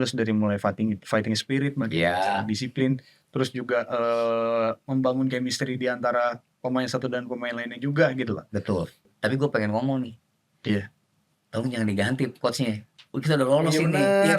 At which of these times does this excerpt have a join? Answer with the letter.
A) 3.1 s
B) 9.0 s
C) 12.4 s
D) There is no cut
B